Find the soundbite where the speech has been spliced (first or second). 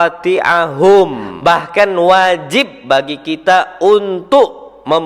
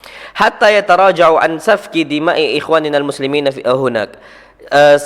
first